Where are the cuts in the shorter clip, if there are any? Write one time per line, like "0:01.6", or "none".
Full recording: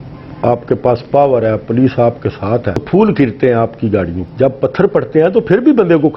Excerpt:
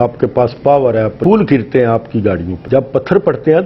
0:01.2